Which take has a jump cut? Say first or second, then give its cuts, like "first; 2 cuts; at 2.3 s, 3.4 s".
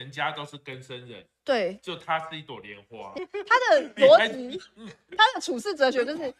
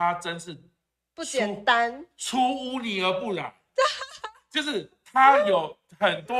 first; 1 cut; at 3.2 s